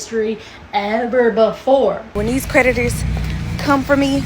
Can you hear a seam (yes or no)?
yes